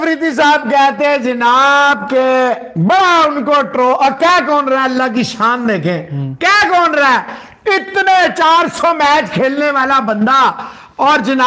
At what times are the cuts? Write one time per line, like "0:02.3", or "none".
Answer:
none